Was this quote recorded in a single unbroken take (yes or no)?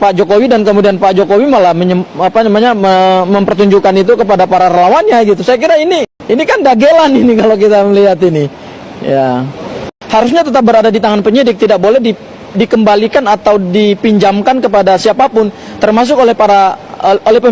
no